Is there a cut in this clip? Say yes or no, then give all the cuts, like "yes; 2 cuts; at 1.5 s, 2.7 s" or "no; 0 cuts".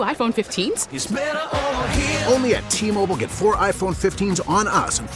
no; 0 cuts